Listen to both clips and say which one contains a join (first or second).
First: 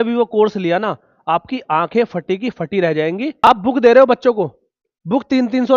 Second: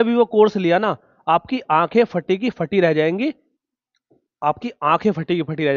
first